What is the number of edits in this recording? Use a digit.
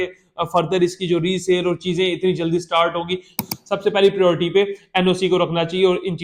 1